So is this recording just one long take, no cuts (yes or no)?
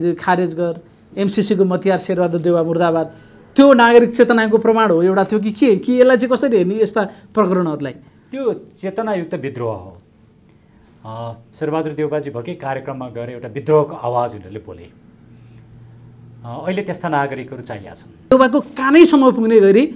no